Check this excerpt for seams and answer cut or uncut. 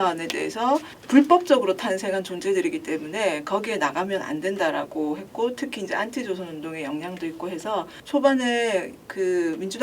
cut